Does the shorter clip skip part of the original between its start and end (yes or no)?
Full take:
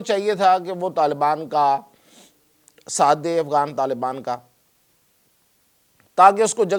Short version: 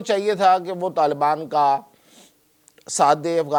no